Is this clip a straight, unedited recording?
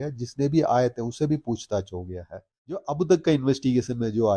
no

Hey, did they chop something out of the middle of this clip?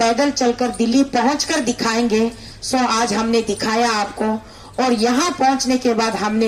no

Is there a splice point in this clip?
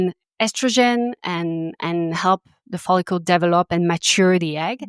no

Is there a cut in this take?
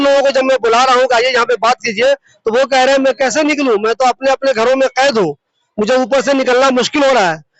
no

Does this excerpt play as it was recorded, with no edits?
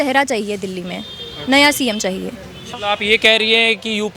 no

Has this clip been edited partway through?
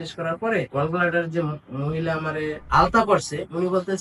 no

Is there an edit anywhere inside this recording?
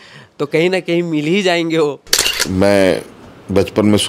yes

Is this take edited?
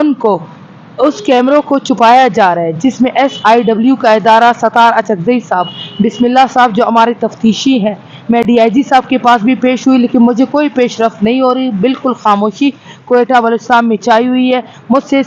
no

